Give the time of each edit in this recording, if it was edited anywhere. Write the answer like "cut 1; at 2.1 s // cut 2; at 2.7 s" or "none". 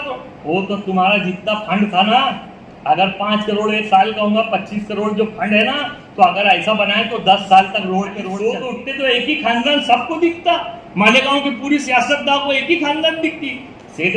cut 1; at 8.3 s